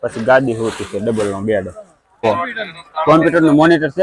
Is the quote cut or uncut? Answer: cut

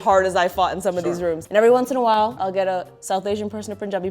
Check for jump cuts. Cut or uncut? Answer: cut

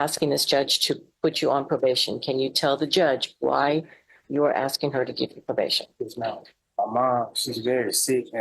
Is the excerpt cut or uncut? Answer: cut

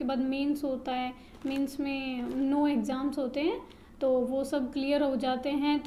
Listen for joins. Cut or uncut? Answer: uncut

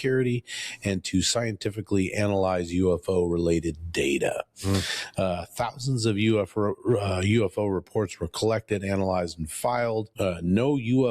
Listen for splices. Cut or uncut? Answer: cut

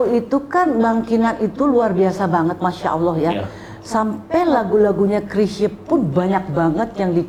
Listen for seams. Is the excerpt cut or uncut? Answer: uncut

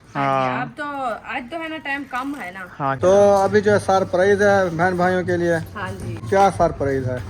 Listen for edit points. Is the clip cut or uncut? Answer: cut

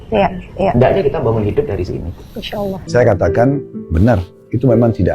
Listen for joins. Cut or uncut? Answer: cut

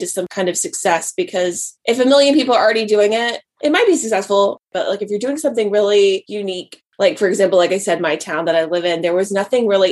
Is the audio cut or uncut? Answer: uncut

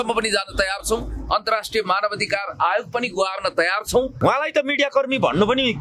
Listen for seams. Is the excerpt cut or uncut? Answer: cut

